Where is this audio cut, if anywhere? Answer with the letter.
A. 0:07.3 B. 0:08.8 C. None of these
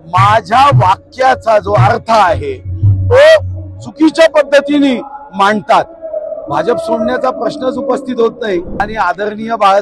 B